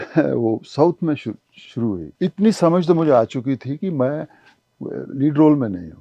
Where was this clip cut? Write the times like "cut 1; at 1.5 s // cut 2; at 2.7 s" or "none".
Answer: cut 1; at 2.1 s